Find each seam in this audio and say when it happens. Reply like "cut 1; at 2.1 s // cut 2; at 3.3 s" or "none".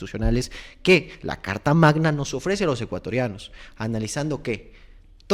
none